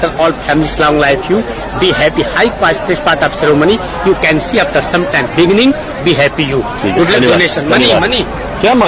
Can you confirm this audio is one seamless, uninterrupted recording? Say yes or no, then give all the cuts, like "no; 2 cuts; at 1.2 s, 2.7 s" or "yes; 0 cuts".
yes; 0 cuts